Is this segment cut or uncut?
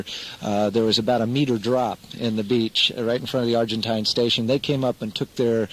cut